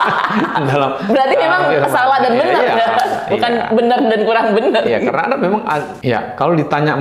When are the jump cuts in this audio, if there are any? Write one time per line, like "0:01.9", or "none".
none